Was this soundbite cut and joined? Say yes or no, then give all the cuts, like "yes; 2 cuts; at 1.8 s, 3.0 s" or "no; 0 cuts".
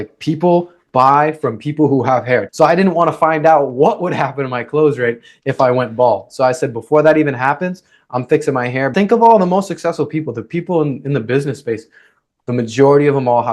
yes; 2 cuts; at 2.5 s, 8.9 s